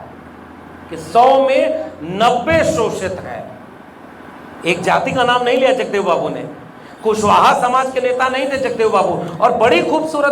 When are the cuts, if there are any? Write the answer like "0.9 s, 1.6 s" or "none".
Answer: none